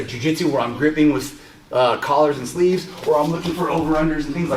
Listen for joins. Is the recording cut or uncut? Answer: uncut